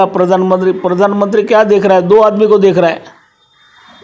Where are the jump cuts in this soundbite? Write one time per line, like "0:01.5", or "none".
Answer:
none